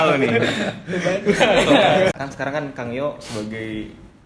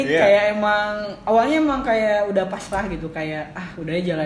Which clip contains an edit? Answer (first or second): first